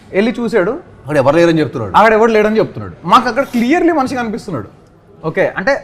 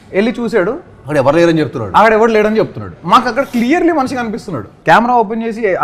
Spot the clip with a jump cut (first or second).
second